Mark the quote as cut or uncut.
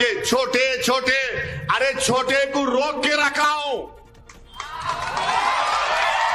uncut